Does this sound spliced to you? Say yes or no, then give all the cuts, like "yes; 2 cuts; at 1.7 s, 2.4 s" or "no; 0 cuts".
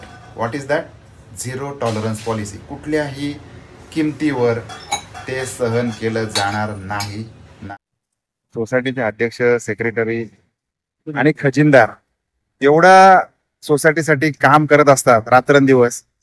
yes; 1 cut; at 7.7 s